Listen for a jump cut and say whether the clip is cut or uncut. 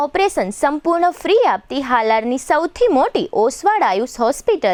uncut